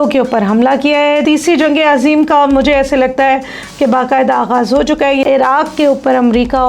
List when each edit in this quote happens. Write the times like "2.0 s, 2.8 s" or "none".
1.2 s, 5.2 s